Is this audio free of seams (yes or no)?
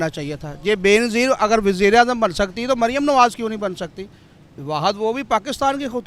yes